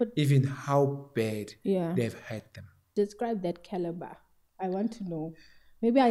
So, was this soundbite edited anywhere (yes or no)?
yes